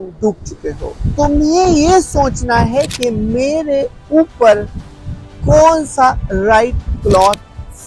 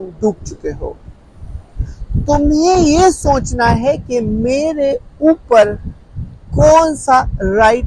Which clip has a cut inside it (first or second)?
first